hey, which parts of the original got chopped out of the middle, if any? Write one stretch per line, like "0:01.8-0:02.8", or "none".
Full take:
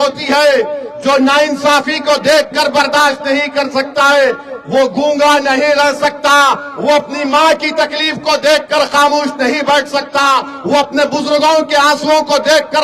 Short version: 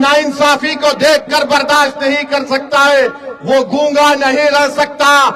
none